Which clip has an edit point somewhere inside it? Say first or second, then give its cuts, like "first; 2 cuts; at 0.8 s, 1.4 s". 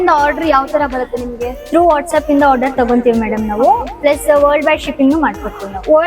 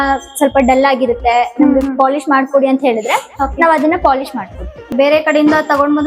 second; 1 cut; at 4.9 s